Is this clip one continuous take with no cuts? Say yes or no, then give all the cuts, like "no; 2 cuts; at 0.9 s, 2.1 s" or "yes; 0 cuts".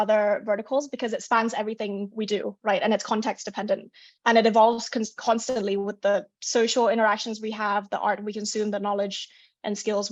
yes; 0 cuts